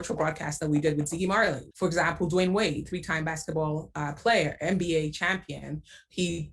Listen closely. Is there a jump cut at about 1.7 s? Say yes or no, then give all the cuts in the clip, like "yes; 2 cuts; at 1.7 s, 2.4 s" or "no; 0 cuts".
yes; 1 cut; at 1.7 s